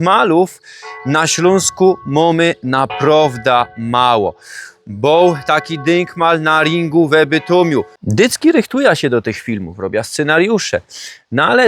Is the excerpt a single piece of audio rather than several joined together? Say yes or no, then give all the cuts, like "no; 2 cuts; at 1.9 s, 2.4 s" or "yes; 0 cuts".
no; 1 cut; at 8.0 s